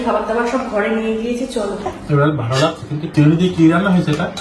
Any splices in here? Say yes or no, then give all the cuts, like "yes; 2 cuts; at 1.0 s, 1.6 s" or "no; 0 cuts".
yes; 2 cuts; at 2.0 s, 3.0 s